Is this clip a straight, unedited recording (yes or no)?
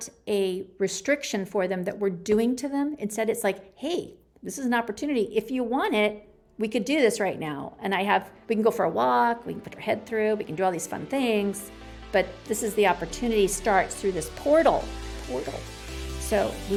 yes